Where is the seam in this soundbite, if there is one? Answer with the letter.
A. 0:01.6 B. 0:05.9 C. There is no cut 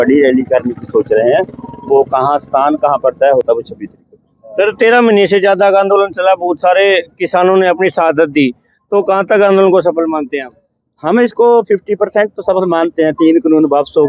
C